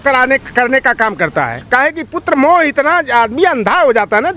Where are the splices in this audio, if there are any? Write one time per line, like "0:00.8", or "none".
0:01.6